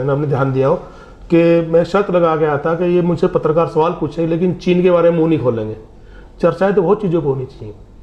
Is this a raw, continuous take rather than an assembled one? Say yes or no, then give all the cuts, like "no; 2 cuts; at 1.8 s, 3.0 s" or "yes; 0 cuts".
yes; 0 cuts